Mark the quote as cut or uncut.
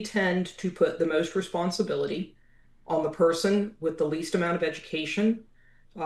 uncut